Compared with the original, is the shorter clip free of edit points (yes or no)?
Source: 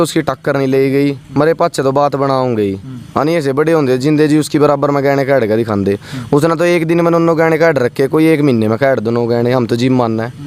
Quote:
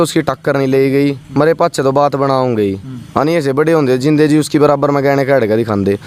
yes